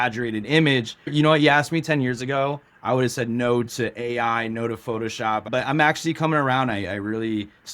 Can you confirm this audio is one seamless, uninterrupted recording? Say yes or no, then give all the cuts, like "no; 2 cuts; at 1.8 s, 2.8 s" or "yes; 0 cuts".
no; 2 cuts; at 1.1 s, 5.5 s